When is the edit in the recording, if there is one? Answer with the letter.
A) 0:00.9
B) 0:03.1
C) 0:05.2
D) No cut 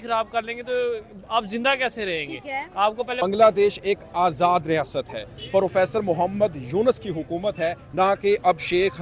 B